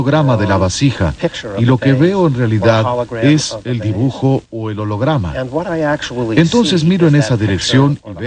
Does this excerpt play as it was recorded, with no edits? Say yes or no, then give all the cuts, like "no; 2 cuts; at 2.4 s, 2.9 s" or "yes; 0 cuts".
no; 1 cut; at 6.0 s